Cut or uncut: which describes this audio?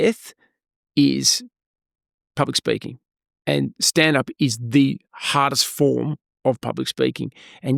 uncut